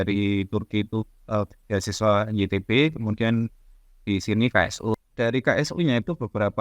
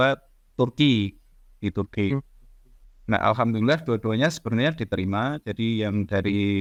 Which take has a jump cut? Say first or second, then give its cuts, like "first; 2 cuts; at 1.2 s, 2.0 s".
first; 1 cut; at 4.9 s